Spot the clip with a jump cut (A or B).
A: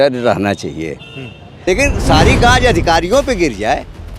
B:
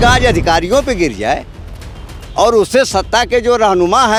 A